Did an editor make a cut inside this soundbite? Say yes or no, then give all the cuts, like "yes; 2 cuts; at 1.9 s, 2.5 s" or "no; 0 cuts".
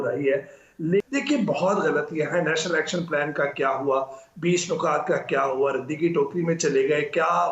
no; 0 cuts